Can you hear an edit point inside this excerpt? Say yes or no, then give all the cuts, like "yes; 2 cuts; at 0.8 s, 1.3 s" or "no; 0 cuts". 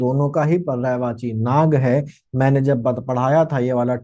no; 0 cuts